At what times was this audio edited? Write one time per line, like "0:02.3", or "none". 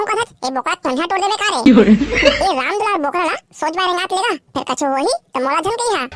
none